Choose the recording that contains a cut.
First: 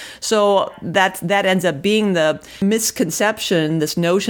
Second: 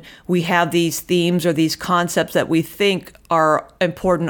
first; 1 cut; at 2.5 s

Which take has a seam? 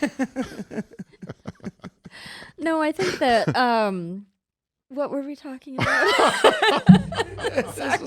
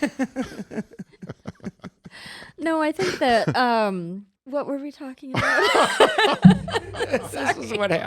second; 1 cut; at 4.3 s

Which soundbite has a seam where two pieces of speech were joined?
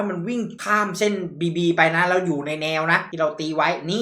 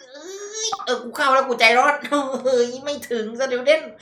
first; 1 cut; at 3.1 s

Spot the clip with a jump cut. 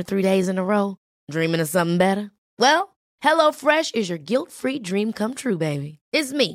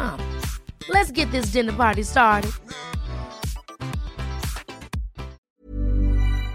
second; 1 cut; at 5.4 s

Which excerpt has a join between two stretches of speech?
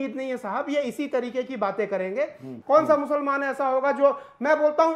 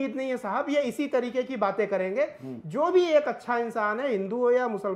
first; 1 cut; at 2.5 s

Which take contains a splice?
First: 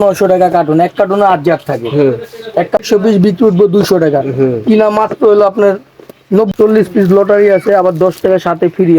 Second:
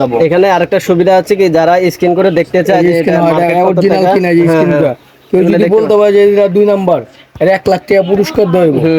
first; 2 cuts; at 2.8 s, 6.5 s

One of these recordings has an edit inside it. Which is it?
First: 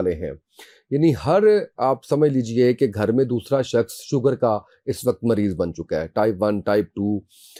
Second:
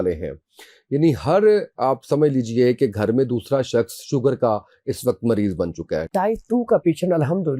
second; 1 cut; at 6.1 s

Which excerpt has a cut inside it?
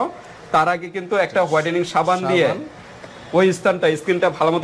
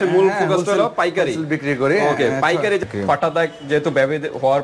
second; 1 cut; at 2.8 s

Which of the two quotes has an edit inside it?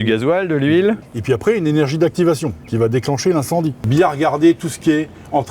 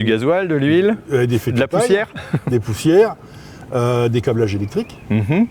first; 2 cuts; at 1.0 s, 3.9 s

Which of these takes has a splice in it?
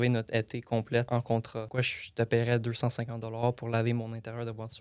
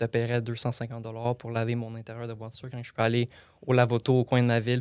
first; 1 cut; at 1.1 s

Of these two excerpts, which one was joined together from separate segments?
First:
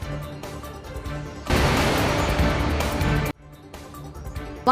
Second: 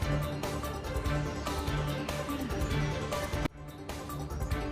second; 1 cut; at 0.9 s

